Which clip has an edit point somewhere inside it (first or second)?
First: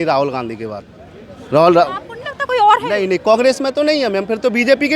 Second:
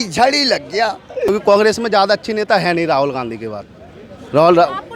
second